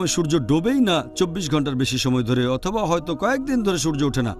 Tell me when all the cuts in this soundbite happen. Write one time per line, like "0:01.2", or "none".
none